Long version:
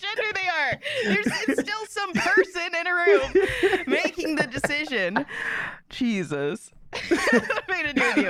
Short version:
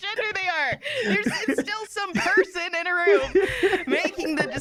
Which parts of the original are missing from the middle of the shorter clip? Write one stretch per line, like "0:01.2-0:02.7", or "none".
none